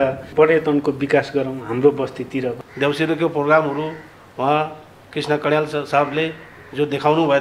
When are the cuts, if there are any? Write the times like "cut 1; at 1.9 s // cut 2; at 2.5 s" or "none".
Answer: cut 1; at 2.6 s